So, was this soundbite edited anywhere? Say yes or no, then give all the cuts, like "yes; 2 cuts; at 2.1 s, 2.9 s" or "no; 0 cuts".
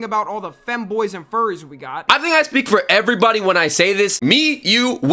yes; 1 cut; at 2.0 s